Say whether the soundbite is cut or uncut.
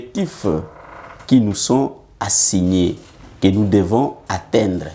uncut